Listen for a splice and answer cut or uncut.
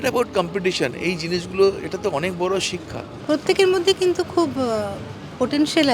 uncut